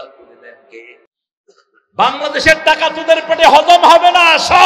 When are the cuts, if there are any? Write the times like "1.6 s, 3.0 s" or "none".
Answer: 1.1 s